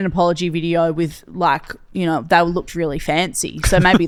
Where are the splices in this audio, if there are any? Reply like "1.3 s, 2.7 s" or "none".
none